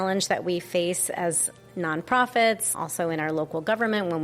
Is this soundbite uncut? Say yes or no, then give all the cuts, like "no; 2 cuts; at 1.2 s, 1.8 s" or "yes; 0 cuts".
yes; 0 cuts